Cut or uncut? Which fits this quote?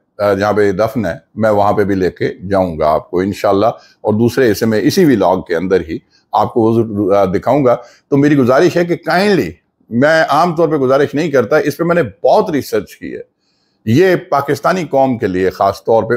uncut